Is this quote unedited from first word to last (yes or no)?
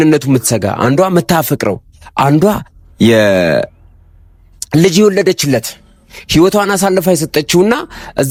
yes